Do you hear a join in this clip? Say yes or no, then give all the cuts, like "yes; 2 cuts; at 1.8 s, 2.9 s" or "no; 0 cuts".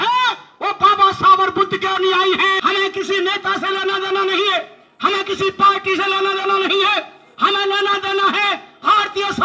yes; 1 cut; at 2.6 s